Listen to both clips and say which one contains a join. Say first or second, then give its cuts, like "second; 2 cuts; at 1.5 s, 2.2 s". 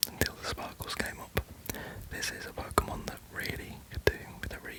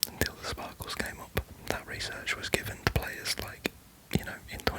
second; 1 cut; at 1.6 s